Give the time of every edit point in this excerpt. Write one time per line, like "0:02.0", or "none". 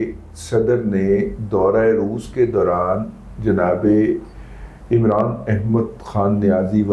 none